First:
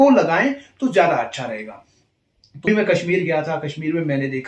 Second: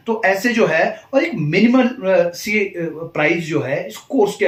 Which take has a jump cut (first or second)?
first